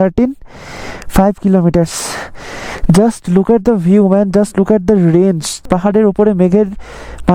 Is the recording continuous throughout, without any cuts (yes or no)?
no